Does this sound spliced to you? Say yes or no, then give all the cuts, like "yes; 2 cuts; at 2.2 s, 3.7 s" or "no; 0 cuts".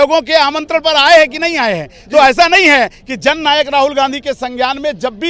no; 0 cuts